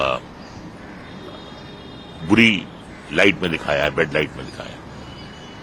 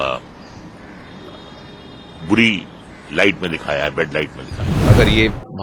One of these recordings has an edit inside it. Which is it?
second; 1 cut; at 4.7 s

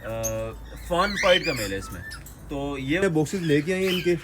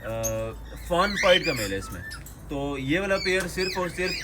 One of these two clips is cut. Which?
first; 1 cut; at 3.0 s

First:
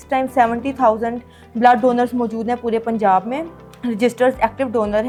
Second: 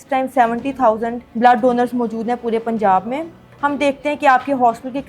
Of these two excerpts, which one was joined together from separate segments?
second; 2 cuts; at 1.2 s, 3.4 s

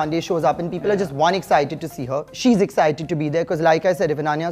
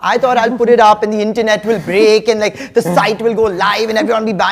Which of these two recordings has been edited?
first; 1 cut; at 2.3 s

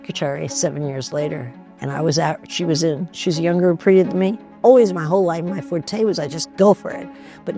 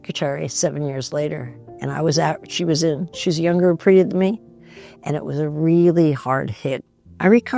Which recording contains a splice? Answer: first; 1 cut; at 4.5 s

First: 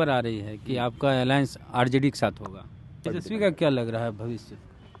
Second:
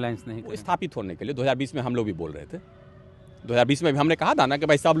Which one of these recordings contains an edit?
first; 1 cut; at 3.0 s

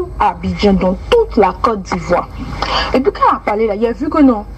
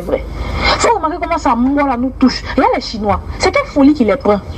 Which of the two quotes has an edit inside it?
first; 1 cut; at 2.6 s

